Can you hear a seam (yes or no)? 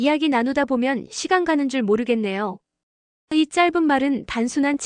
no